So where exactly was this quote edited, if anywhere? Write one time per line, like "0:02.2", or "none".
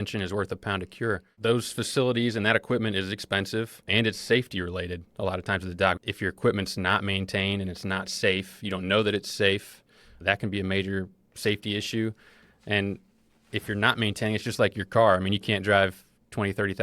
0:01.3
0:03.8
0:06.0